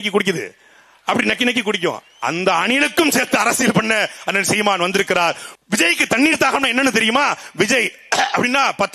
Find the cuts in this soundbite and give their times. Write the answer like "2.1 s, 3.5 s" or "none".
5.5 s